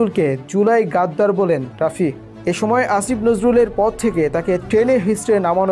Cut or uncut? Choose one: uncut